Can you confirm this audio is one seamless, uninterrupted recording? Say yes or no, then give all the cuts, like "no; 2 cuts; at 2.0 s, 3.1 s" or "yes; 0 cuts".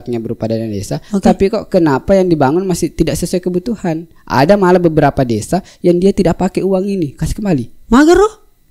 yes; 0 cuts